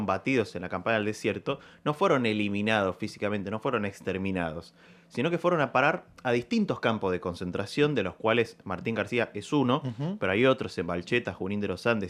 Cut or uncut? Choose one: uncut